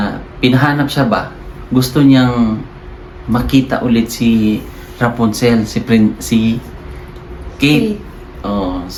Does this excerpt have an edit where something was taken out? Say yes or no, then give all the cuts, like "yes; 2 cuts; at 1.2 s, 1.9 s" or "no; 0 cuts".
no; 0 cuts